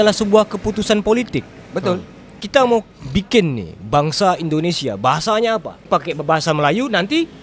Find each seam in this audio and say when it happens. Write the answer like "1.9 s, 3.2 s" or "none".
none